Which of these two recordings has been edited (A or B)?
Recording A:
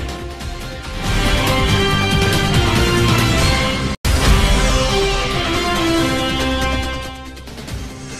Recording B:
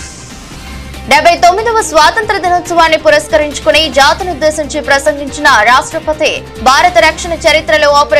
B